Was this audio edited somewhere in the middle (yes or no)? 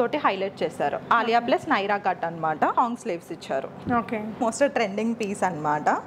yes